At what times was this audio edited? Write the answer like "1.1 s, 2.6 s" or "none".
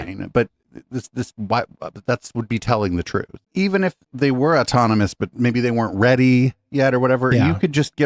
3.4 s

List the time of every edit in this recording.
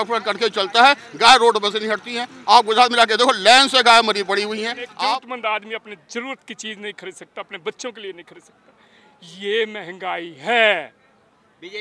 5.2 s

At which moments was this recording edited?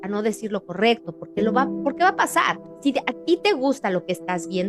2.6 s

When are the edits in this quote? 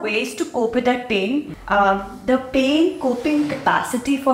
1.5 s

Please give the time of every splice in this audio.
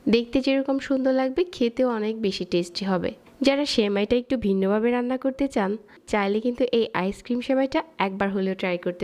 3.2 s, 6.0 s

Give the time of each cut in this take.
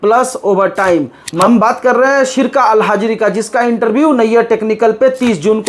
1.4 s

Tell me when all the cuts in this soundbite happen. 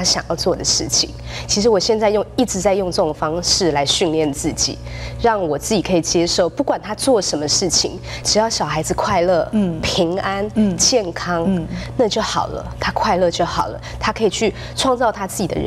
8.1 s

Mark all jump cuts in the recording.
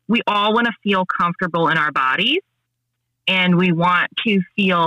none

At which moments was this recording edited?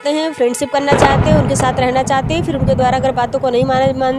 none

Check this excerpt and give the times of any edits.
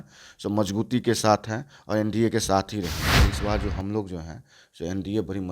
3.2 s

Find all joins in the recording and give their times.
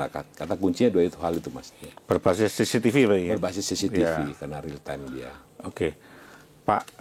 none

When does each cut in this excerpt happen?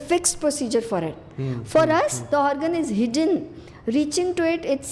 none

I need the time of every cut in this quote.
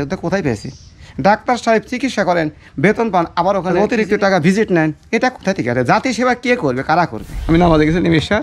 3.7 s, 7.3 s

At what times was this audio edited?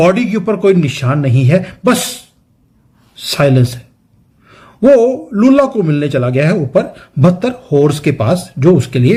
none

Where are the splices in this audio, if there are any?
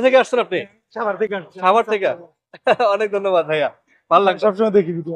none

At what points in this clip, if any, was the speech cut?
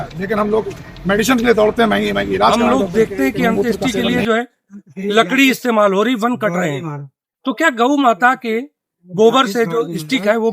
2.5 s

